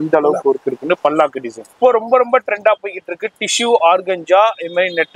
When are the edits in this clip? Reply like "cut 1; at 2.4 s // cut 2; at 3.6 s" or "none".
cut 1; at 1.7 s